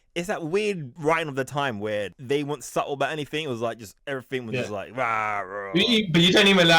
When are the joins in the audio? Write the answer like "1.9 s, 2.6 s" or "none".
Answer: 0.9 s, 2.2 s, 3.9 s

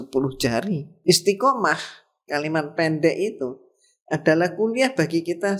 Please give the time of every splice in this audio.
0.9 s

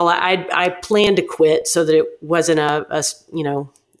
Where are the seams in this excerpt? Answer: none

